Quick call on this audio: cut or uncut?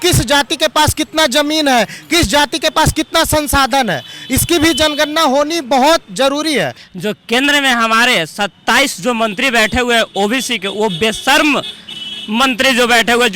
cut